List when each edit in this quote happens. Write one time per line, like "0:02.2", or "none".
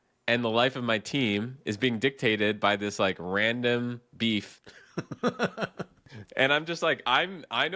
0:04.5